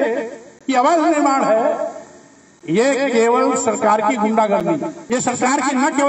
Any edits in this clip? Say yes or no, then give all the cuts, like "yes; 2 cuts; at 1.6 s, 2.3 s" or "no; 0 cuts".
yes; 1 cut; at 5.0 s